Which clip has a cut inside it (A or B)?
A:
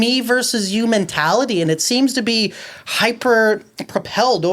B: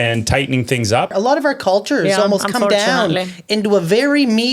B